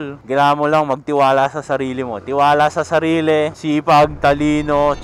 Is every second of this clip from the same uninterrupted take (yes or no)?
yes